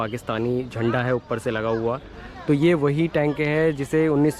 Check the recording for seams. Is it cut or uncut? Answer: uncut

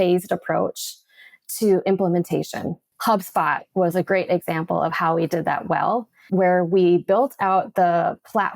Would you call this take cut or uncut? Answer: cut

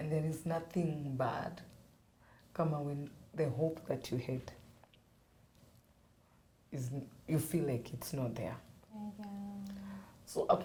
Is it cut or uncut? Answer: uncut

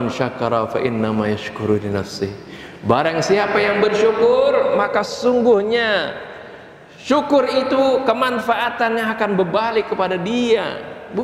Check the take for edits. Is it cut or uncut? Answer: uncut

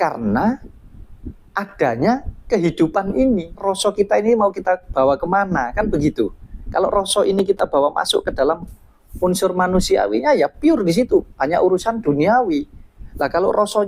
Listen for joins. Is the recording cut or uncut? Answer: cut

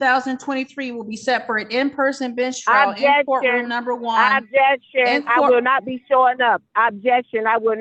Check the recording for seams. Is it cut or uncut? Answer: uncut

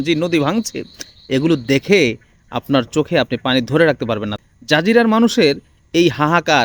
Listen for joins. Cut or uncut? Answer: cut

